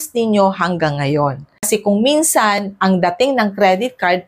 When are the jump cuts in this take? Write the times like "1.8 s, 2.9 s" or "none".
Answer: 1.7 s